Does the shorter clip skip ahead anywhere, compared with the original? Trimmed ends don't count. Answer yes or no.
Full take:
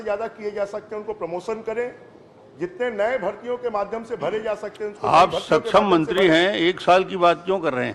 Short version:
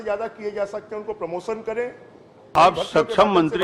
yes